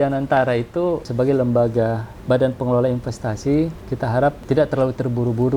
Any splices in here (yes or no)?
yes